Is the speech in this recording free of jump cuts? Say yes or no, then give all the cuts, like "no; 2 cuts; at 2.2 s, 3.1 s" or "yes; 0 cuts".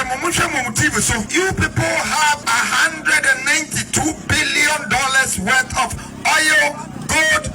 no; 2 cuts; at 1.3 s, 2.4 s